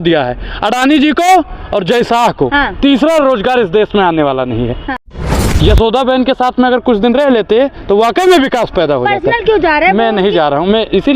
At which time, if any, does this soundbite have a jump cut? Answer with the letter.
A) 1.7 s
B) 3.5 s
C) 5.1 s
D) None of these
C